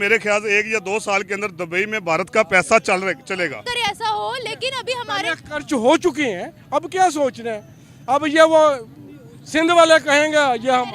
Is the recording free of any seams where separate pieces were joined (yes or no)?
no